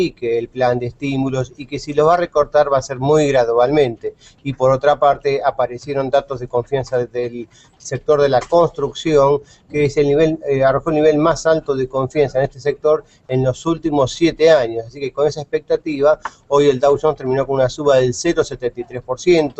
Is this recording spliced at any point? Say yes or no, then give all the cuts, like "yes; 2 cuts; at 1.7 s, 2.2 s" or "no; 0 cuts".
yes; 1 cut; at 16.6 s